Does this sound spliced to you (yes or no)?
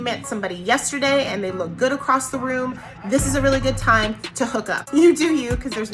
yes